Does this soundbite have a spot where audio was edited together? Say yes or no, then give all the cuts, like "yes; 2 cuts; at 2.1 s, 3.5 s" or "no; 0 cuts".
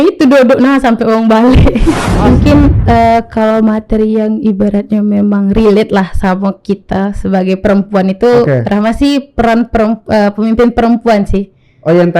yes; 1 cut; at 2.1 s